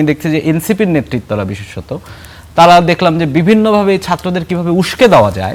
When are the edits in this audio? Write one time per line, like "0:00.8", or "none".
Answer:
none